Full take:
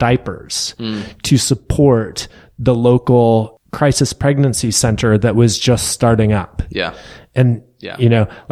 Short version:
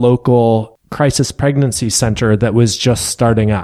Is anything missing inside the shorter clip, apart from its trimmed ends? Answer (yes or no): no